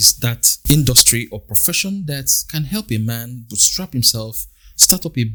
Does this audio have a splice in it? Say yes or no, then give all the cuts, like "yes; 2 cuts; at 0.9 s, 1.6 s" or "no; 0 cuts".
no; 0 cuts